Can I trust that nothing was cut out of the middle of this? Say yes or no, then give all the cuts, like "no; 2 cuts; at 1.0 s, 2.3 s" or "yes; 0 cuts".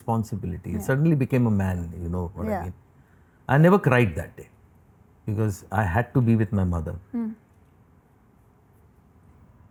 yes; 0 cuts